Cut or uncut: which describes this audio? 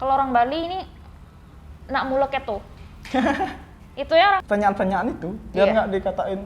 cut